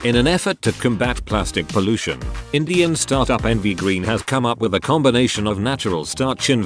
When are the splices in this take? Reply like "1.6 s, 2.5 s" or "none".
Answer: 4.7 s